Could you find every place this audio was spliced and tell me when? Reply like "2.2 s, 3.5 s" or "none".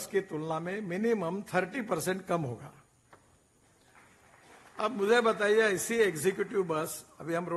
none